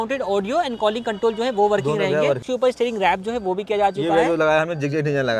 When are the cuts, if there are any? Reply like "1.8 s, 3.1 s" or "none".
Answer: 2.4 s